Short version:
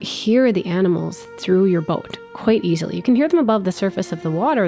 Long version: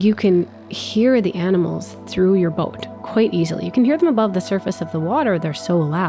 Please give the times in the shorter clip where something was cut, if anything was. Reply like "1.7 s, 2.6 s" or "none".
none